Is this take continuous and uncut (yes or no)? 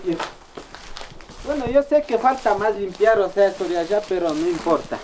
yes